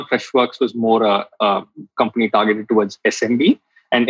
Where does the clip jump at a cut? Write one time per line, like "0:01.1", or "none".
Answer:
none